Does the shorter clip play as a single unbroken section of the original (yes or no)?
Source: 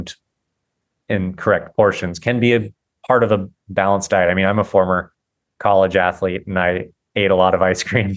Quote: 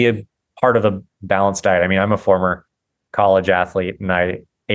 yes